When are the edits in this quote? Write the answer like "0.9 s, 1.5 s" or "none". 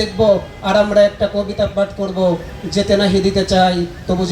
none